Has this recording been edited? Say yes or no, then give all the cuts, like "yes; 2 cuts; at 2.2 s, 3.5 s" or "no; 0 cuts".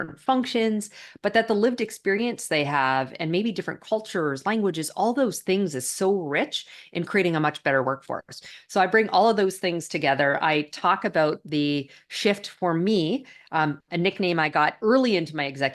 no; 0 cuts